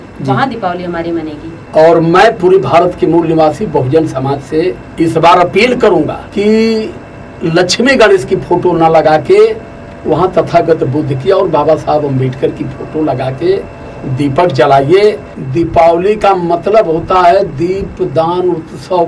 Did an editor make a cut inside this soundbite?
yes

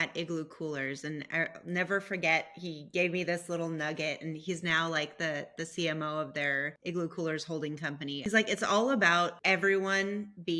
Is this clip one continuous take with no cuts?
no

